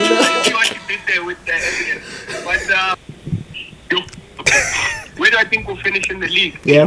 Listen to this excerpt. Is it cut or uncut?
cut